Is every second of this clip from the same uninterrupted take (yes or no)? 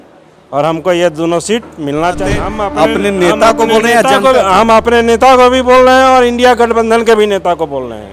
no